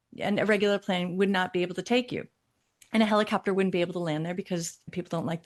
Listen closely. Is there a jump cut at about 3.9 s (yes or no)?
no